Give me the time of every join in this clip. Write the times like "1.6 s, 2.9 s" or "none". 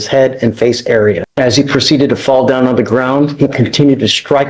1.3 s